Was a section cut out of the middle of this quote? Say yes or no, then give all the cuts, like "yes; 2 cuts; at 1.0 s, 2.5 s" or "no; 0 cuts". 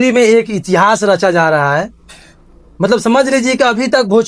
no; 0 cuts